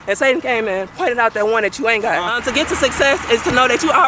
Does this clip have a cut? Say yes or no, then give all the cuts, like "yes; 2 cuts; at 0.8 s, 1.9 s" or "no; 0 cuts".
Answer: yes; 1 cut; at 2.4 s